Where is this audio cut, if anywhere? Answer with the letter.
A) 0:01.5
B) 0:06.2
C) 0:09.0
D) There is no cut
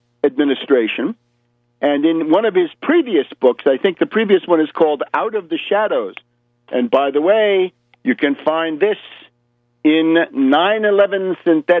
D